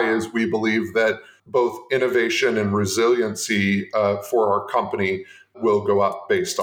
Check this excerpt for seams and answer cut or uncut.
cut